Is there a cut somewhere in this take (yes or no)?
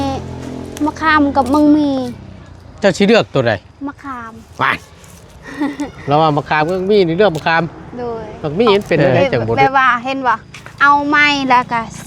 yes